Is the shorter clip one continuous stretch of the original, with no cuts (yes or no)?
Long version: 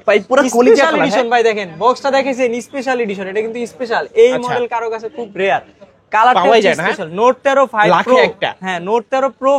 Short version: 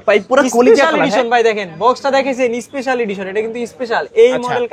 yes